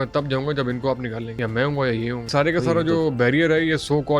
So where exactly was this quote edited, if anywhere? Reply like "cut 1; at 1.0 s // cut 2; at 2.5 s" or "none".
cut 1; at 1.3 s // cut 2; at 2.3 s